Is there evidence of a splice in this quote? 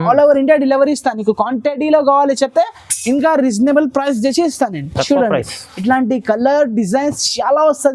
no; 0 cuts

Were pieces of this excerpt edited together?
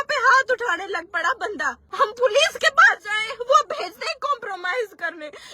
yes; 1 cut; at 1.8 s

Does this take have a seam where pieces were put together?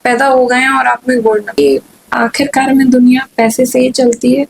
yes; 1 cut; at 1.5 s

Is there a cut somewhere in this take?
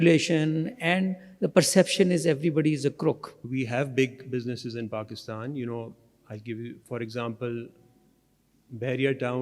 yes; 1 cut; at 3.3 s

